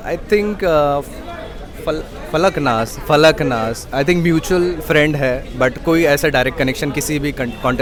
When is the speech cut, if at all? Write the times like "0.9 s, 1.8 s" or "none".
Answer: none